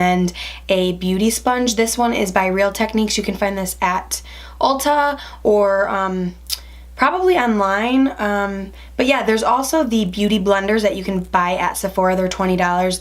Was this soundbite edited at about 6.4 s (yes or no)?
yes